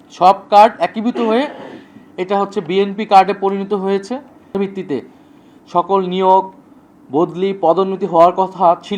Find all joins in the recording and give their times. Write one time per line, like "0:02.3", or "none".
0:04.5

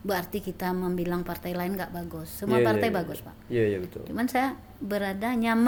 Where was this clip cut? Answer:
none

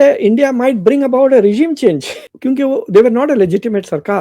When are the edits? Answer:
0:02.1

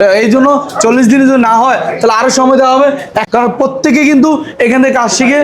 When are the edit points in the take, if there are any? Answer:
0:03.2

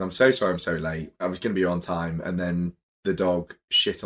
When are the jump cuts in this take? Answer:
0:01.2

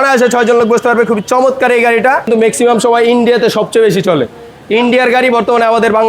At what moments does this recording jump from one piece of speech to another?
0:02.3

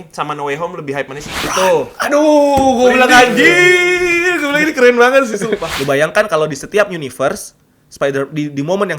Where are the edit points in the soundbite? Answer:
0:01.4
0:05.7

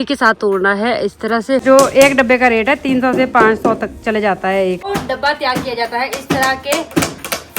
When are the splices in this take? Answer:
0:01.6
0:04.9

